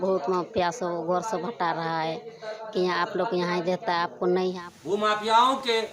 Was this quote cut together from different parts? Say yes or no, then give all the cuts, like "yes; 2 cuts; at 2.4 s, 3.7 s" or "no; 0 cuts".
yes; 1 cut; at 4.7 s